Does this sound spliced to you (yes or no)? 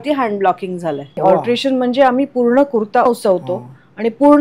yes